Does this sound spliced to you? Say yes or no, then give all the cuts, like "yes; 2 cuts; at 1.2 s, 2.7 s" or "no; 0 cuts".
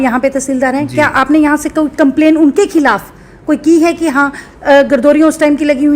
no; 0 cuts